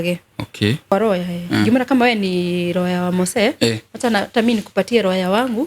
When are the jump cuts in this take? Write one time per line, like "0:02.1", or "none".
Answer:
0:00.9